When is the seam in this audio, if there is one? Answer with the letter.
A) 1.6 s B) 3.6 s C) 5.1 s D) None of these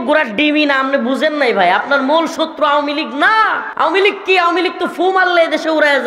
B